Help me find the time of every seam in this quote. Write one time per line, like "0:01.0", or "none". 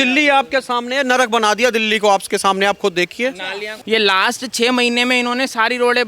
0:03.7

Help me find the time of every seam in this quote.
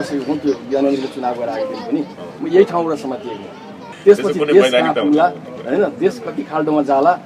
0:03.9

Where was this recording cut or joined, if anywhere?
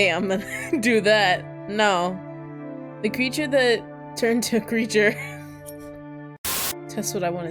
0:06.6

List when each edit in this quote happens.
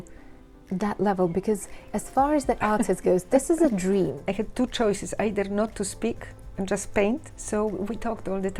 0:04.2
0:07.3

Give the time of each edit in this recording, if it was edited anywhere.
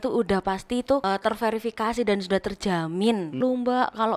0:01.0
0:03.4

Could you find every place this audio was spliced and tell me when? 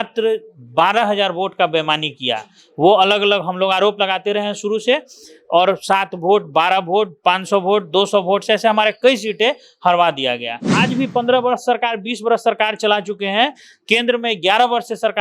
0:10.7

